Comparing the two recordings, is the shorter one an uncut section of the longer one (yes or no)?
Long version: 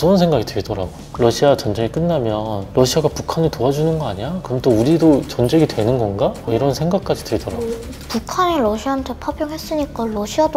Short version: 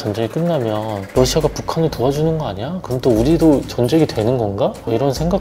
yes